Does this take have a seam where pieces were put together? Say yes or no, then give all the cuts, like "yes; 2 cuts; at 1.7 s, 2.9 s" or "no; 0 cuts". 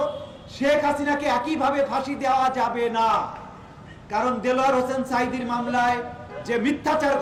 no; 0 cuts